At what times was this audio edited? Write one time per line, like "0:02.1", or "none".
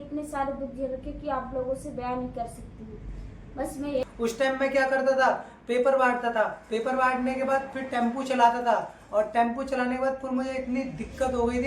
0:04.0